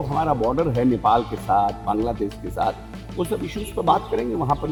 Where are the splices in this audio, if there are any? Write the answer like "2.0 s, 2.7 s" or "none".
none